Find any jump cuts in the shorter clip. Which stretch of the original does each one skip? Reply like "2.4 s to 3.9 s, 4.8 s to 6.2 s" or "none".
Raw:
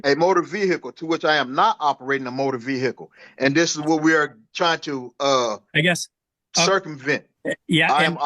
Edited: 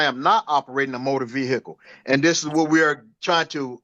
none